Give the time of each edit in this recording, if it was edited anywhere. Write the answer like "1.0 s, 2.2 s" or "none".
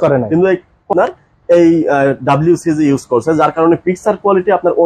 0.9 s